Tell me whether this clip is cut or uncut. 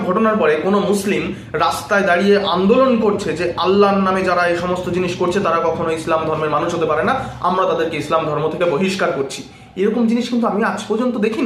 uncut